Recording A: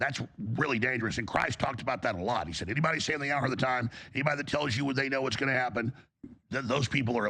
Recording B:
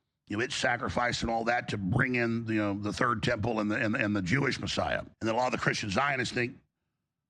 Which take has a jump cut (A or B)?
B